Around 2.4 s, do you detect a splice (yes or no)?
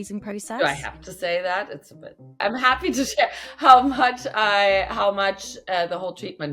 yes